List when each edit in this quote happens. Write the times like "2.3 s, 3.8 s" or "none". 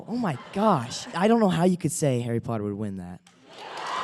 1.1 s